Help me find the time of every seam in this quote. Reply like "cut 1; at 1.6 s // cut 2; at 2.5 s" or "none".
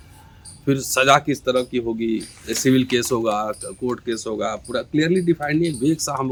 none